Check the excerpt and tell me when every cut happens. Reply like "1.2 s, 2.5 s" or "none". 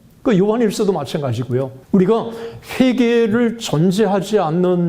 1.8 s